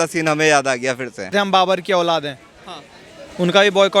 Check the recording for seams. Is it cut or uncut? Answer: cut